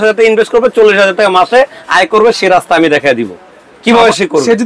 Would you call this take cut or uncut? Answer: uncut